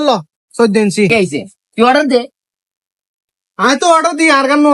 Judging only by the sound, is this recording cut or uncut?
cut